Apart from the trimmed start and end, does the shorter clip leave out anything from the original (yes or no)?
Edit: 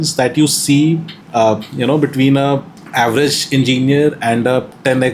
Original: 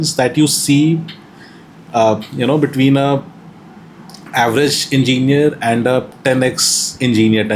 yes